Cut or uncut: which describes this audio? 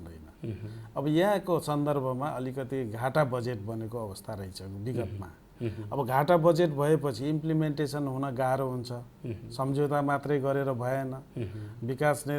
uncut